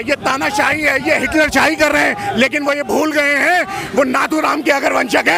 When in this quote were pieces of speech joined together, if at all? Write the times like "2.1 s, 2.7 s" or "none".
none